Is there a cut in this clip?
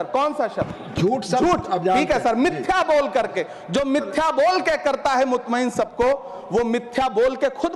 no; 0 cuts

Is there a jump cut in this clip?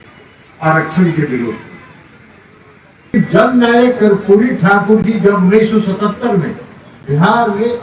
yes; 1 cut; at 3.1 s

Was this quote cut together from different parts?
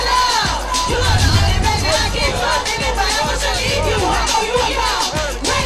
no; 0 cuts

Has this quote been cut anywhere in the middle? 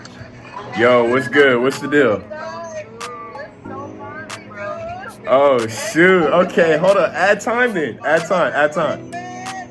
no; 0 cuts

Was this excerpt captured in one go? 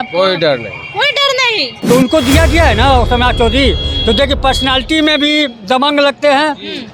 no; 1 cut; at 1.7 s

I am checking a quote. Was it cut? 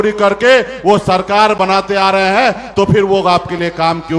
no; 0 cuts

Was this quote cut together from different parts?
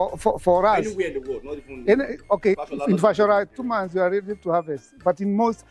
yes; 1 cut; at 2.6 s

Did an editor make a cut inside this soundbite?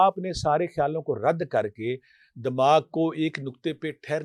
no; 0 cuts

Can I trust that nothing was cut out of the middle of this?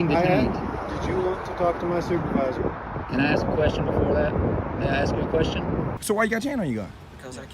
no; 1 cut; at 6.0 s

